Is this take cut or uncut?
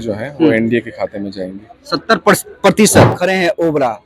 cut